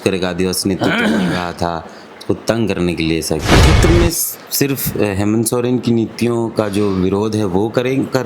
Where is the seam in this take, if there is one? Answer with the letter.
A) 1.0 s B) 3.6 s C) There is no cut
B